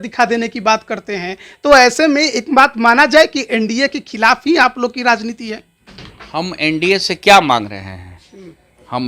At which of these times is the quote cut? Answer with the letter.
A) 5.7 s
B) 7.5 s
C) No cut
C